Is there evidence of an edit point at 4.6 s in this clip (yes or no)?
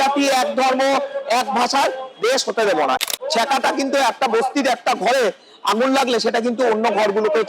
no